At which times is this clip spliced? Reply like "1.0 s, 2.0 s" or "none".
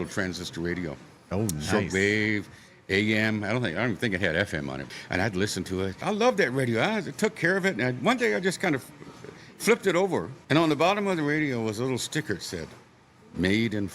6.0 s, 10.4 s